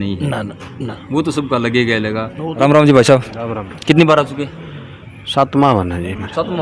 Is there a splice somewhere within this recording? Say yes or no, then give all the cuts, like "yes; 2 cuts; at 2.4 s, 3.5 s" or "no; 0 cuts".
no; 0 cuts